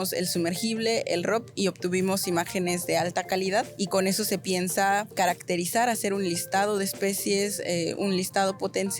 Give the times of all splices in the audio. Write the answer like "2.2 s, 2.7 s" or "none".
3.8 s, 5.1 s